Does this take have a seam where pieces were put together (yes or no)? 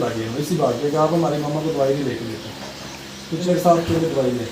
yes